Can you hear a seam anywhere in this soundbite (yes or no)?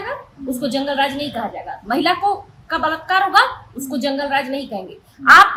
no